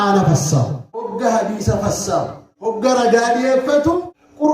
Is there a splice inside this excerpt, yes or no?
yes